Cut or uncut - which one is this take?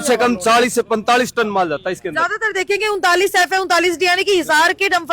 uncut